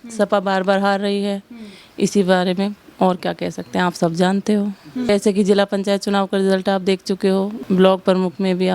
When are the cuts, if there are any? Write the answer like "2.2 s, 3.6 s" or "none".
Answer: 7.6 s